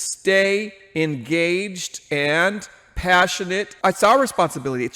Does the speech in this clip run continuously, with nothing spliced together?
no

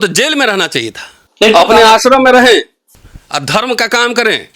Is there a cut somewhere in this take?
yes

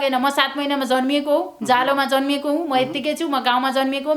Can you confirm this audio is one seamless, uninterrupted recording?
yes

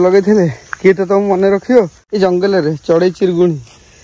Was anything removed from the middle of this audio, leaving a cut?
yes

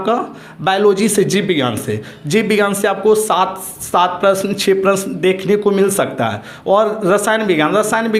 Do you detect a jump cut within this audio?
no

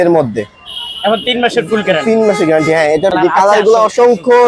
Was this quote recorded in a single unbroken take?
no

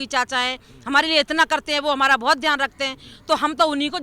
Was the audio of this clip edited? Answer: no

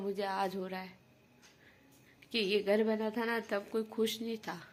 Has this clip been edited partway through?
no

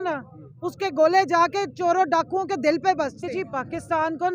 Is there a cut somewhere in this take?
yes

